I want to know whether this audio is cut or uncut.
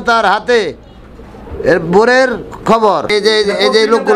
cut